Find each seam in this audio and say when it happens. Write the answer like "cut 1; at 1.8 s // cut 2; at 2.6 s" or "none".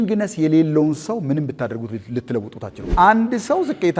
cut 1; at 2.8 s